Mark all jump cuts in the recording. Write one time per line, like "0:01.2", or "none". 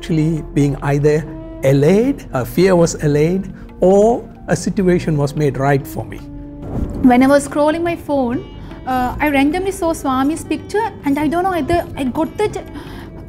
0:06.5